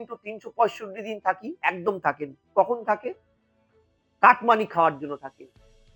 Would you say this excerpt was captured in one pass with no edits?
yes; 0 cuts

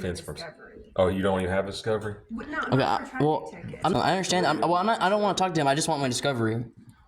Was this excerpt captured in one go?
no; 1 cut; at 3.9 s

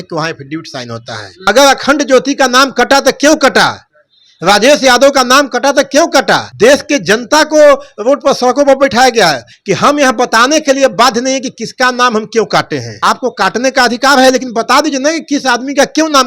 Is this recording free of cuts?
no; 4 cuts; at 1.3 s, 6.5 s, 9.5 s, 12.8 s

